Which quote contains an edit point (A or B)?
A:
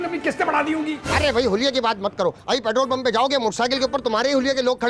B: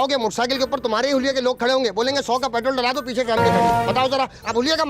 A